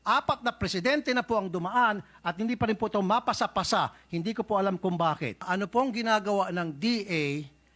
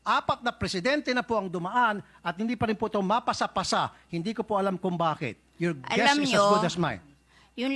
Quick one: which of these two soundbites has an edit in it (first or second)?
first